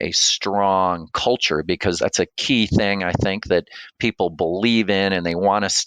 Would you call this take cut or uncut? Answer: cut